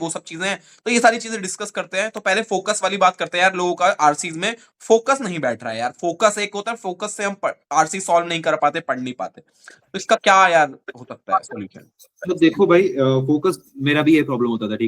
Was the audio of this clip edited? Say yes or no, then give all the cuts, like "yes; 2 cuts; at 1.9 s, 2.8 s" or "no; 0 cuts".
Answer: no; 0 cuts